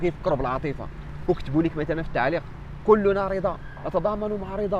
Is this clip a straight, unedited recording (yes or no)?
yes